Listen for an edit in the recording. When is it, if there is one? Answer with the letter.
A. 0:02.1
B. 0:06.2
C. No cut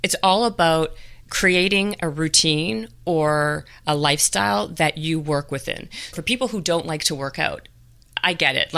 B